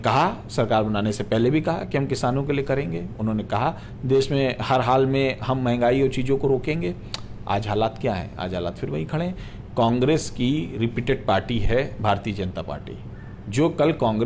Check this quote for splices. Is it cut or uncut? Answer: uncut